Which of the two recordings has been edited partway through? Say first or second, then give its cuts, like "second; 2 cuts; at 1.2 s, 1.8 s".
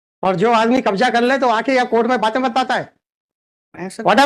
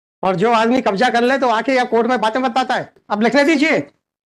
second; 1 cut; at 3.0 s